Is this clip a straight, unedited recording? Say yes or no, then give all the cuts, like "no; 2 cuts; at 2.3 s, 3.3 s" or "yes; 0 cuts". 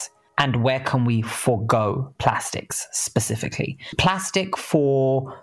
no; 1 cut; at 3.9 s